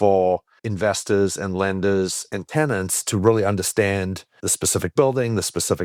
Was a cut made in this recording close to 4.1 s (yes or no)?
no